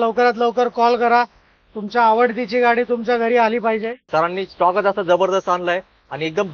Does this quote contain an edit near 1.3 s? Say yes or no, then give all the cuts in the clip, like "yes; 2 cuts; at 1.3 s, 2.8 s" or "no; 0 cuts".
no; 1 cut; at 4.0 s